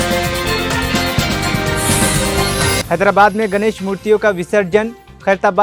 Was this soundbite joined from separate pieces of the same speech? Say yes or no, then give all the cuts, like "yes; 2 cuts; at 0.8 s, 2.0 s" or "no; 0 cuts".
yes; 1 cut; at 2.8 s